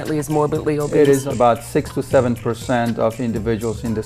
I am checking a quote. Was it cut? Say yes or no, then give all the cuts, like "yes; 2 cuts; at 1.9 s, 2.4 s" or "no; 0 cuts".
yes; 1 cut; at 1.2 s